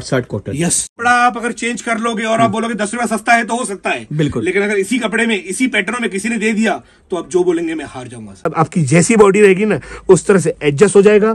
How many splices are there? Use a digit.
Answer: 2